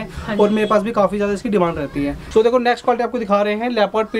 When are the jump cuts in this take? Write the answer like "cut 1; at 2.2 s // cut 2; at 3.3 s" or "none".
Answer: cut 1; at 2.2 s